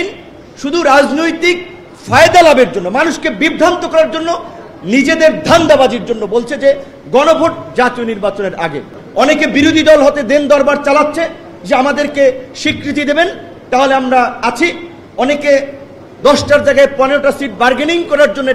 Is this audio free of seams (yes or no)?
no